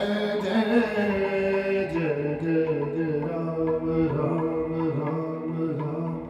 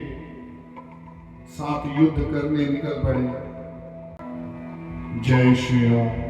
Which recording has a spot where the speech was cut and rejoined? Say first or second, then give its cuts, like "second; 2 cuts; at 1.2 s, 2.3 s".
second; 1 cut; at 4.2 s